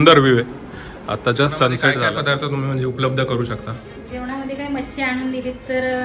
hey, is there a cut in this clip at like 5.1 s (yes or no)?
no